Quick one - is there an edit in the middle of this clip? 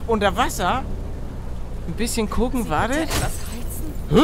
no; 0 cuts

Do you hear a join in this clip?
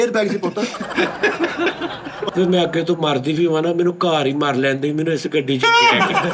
yes; 1 cut; at 2.3 s

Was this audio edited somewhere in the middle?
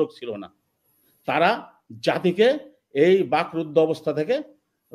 no; 0 cuts

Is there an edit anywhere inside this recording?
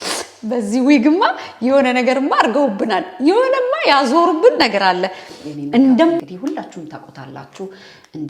yes; 1 cut; at 6.2 s

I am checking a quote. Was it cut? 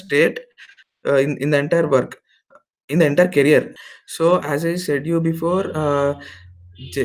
yes; 1 cut; at 3.8 s

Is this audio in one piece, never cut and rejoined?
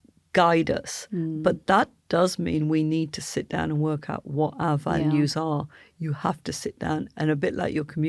yes; 0 cuts

